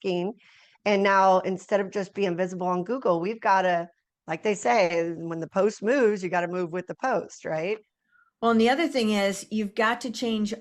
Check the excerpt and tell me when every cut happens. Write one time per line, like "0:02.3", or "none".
none